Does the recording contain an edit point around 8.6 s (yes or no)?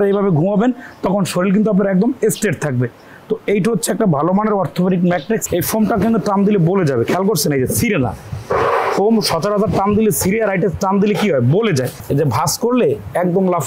no